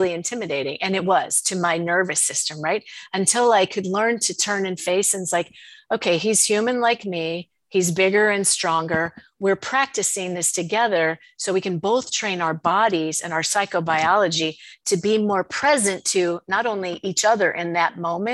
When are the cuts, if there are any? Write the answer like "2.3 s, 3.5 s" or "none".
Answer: none